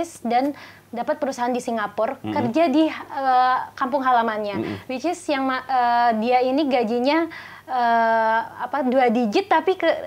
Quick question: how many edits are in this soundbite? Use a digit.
0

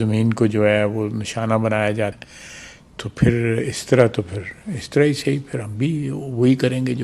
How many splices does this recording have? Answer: 1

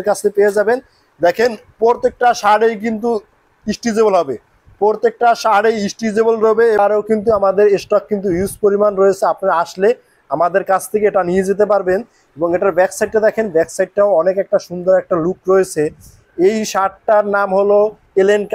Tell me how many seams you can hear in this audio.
1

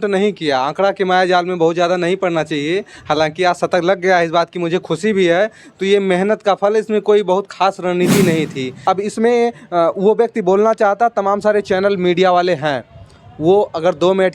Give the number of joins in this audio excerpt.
1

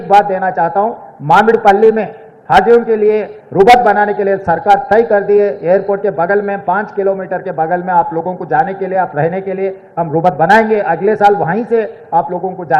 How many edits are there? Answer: 0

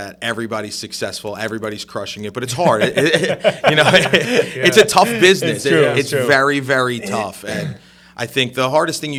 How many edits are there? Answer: 0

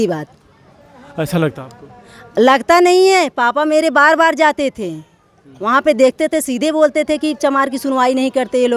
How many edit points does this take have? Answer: 0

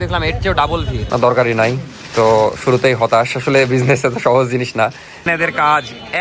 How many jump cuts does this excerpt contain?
2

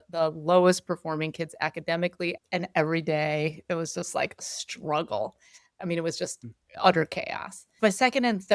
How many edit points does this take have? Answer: 3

